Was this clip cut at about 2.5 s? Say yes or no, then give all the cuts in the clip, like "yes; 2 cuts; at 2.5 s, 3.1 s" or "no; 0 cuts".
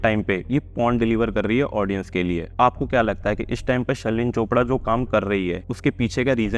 yes; 2 cuts; at 2.5 s, 5.7 s